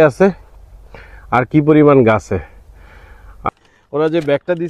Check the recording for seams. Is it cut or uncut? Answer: cut